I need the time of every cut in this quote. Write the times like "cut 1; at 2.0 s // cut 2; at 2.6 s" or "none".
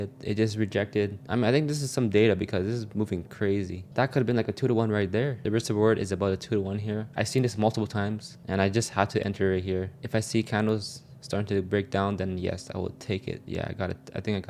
cut 1; at 1.2 s // cut 2; at 5.4 s // cut 3; at 10.0 s // cut 4; at 13.4 s